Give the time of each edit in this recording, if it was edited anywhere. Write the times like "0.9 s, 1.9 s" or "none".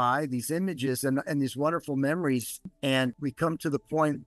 2.6 s